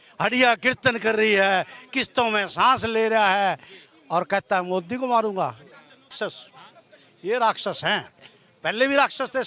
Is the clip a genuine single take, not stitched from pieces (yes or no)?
no